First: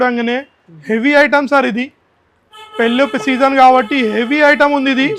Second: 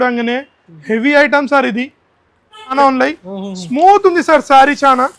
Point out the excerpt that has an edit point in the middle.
second; 1 cut; at 2.7 s

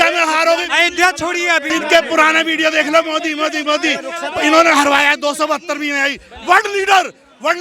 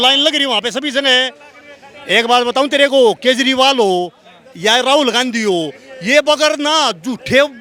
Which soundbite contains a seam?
first; 1 cut; at 1.6 s

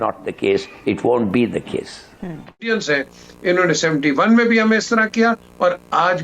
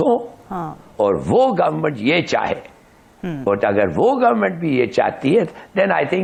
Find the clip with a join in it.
first; 1 cut; at 2.7 s

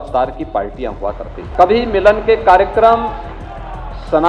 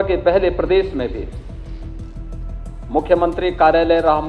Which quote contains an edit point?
first; 1 cut; at 1.4 s

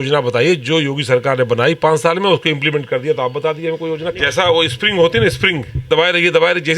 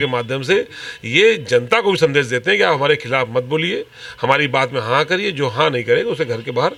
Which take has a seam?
first; 2 cuts; at 4.1 s, 5.9 s

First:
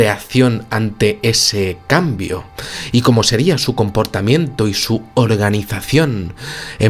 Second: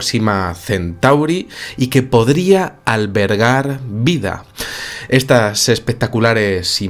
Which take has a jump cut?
second; 1 cut; at 1.1 s

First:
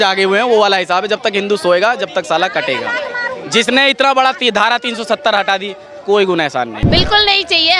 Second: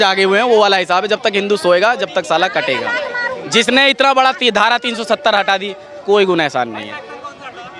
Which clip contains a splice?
first; 1 cut; at 6.8 s

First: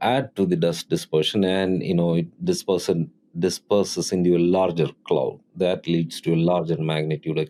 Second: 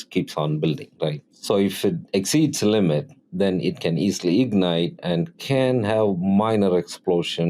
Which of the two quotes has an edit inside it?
second; 2 cuts; at 1.3 s, 3.2 s

